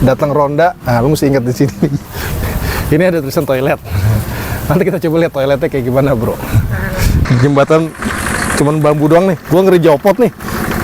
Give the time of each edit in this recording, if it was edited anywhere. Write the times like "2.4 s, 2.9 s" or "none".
2.0 s, 7.2 s